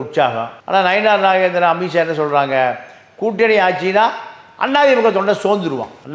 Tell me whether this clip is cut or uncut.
uncut